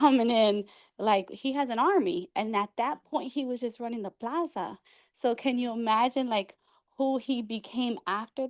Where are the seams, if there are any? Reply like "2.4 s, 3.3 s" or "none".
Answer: none